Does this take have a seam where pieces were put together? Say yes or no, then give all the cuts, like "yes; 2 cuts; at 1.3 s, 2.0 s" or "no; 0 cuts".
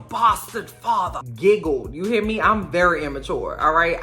yes; 1 cut; at 1.2 s